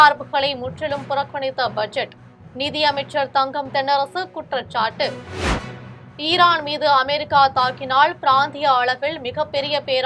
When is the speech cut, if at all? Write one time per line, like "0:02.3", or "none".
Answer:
0:05.6